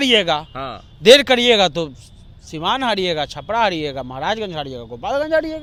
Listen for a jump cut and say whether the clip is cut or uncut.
uncut